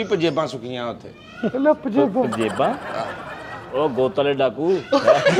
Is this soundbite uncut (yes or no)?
yes